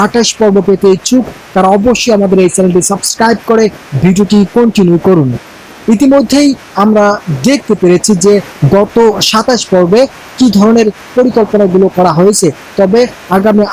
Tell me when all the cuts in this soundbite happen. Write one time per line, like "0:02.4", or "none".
0:08.5